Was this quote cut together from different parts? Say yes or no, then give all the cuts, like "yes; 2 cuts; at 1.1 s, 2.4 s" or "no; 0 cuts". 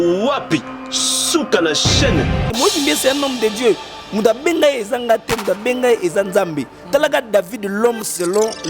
yes; 1 cut; at 2.5 s